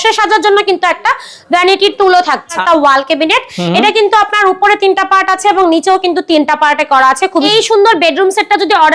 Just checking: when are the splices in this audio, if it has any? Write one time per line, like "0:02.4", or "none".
0:02.6
0:07.4